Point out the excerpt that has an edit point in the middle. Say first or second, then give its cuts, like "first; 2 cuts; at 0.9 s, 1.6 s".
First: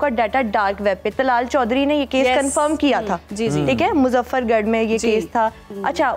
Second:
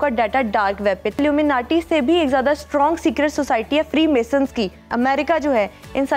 second; 2 cuts; at 1.2 s, 4.8 s